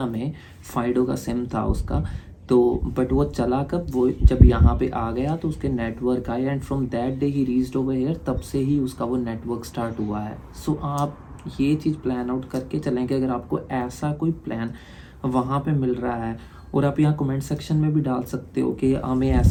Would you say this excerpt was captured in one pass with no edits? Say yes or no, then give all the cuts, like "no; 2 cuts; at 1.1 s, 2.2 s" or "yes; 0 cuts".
yes; 0 cuts